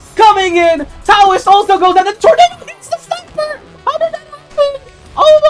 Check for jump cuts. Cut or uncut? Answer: uncut